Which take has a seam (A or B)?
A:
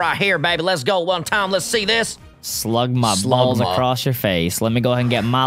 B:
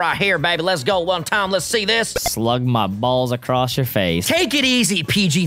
B